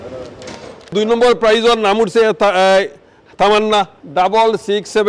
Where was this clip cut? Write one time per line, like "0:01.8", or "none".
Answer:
0:00.9
0:04.0